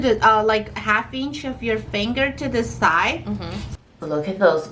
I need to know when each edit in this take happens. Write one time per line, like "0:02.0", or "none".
0:03.5

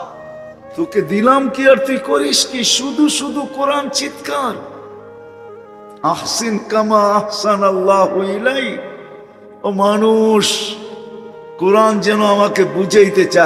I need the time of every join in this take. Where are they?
none

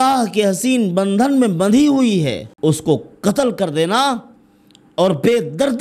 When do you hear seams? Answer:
0:02.5

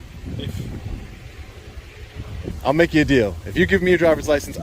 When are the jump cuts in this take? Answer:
0:02.4

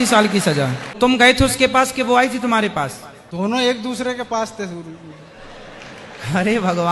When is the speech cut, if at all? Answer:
0:00.9
0:02.8

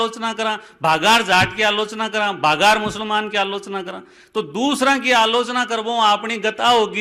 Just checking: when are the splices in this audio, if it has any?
none

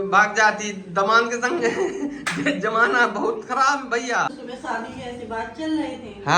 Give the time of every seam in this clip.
0:04.3

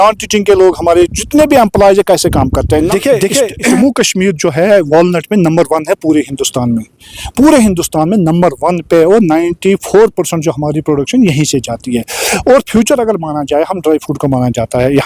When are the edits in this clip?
0:02.7
0:03.8

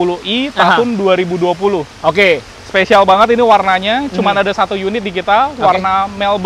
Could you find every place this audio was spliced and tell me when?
none

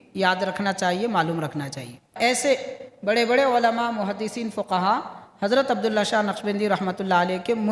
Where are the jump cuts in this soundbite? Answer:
0:02.1

